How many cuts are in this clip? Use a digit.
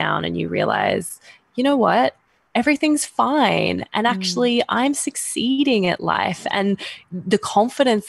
0